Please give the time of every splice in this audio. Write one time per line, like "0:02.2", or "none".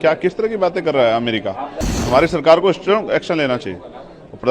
0:02.0